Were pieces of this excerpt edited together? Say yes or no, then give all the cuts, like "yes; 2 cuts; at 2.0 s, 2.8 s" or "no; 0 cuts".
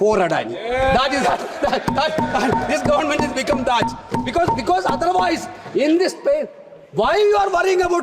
no; 0 cuts